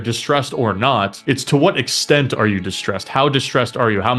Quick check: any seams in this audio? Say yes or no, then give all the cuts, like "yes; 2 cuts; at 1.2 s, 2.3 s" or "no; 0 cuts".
yes; 1 cut; at 1.2 s